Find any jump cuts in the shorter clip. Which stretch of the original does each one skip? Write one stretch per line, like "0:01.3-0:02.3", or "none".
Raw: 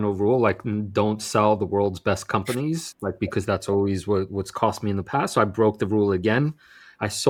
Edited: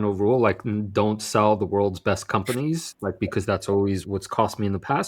0:04.0-0:04.3